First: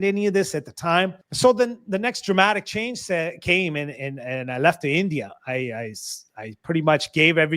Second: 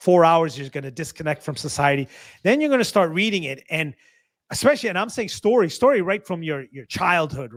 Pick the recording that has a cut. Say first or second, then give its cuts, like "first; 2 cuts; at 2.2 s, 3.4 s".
first; 1 cut; at 1.2 s